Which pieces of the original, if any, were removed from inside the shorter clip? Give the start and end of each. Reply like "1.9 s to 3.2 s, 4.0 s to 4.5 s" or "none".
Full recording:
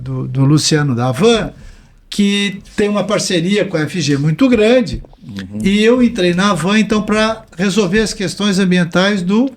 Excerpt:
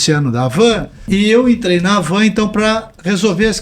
1.6 s to 5.5 s